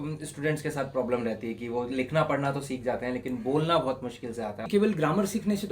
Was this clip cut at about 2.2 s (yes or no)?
no